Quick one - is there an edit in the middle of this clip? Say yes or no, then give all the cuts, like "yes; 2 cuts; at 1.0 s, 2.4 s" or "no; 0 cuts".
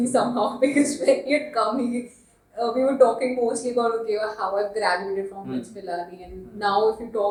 no; 0 cuts